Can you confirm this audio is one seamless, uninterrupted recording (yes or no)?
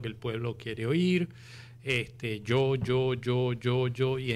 yes